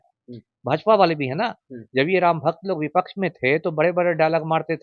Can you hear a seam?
no; 0 cuts

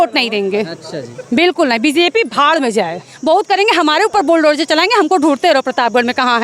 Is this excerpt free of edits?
no; 1 cut; at 3.1 s

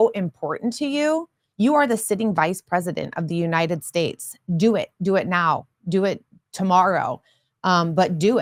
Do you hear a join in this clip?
no; 0 cuts

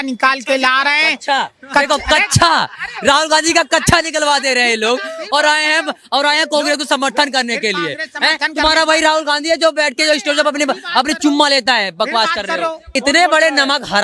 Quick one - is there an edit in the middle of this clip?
yes; 1 cut; at 12.9 s

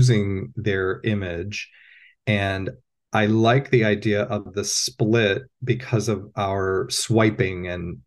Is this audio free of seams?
yes; 0 cuts

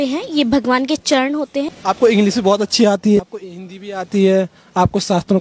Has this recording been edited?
yes; 2 cuts; at 1.7 s, 3.2 s

